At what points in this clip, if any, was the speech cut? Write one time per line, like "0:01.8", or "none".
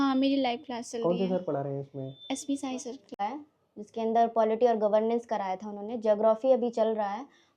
0:03.1